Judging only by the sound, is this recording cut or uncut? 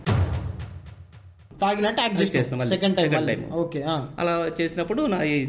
cut